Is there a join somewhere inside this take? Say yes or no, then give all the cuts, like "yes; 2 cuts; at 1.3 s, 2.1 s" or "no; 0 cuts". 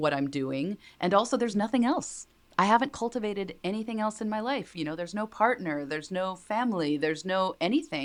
no; 0 cuts